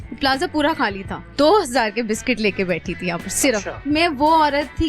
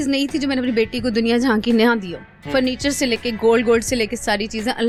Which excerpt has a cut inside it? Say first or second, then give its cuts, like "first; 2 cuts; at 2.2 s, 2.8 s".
first; 2 cuts; at 1.2 s, 3.8 s